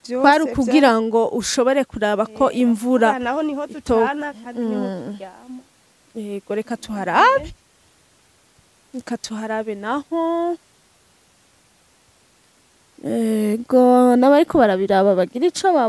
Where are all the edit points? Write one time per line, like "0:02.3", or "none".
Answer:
none